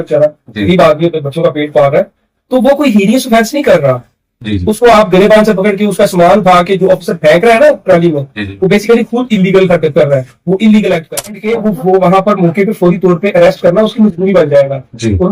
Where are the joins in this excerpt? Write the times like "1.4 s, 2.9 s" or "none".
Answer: 11.4 s